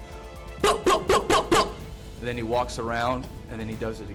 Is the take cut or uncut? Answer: uncut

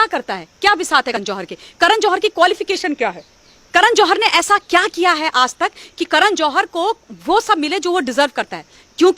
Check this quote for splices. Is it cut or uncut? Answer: cut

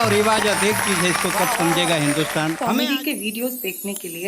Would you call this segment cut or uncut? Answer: cut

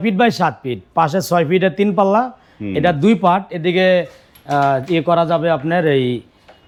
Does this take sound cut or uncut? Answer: uncut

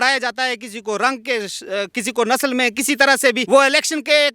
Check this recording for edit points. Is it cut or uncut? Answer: cut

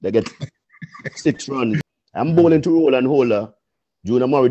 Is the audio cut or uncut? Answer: cut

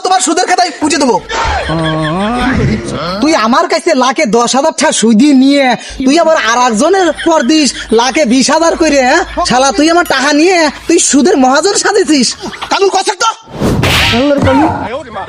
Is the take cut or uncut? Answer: cut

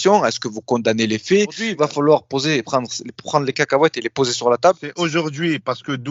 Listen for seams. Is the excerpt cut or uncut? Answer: cut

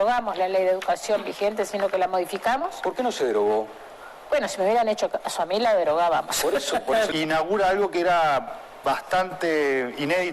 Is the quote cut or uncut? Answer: cut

